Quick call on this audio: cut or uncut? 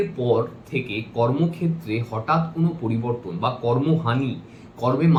uncut